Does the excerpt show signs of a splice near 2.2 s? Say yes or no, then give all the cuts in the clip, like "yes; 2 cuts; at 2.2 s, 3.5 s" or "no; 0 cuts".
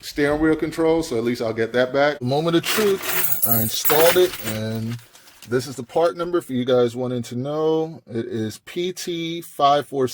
yes; 1 cut; at 2.2 s